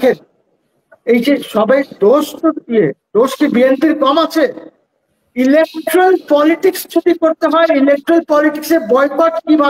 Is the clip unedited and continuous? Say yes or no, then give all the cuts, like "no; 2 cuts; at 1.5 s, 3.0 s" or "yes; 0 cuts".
yes; 0 cuts